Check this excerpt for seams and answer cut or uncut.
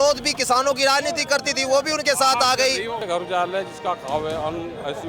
cut